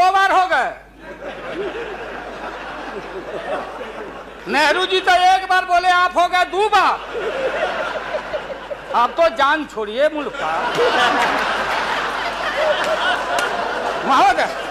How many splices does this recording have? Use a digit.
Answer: 0